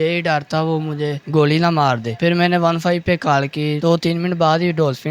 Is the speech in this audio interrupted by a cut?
yes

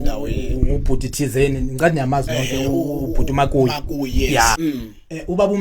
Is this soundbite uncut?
no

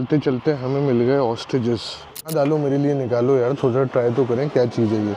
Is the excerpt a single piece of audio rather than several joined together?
no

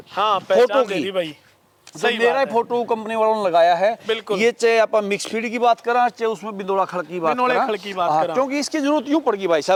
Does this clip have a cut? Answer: no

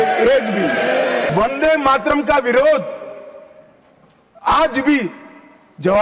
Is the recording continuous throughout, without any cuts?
no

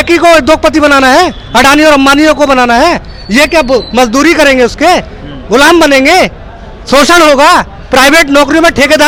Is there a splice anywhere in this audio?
no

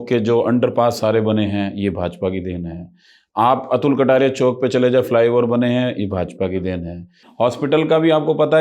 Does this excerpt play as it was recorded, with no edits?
no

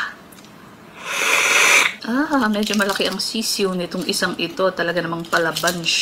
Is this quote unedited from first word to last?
yes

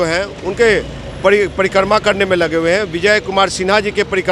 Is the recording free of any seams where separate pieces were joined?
yes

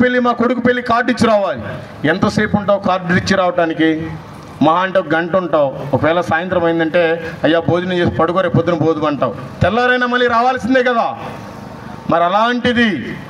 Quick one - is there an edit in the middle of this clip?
no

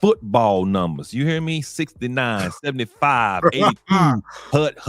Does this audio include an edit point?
no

